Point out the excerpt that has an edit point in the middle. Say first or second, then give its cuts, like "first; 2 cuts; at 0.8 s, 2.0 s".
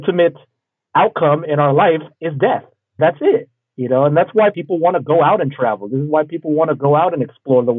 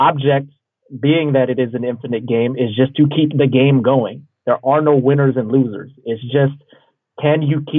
first; 2 cuts; at 3.0 s, 4.5 s